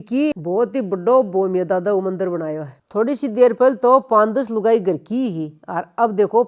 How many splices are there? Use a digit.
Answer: 1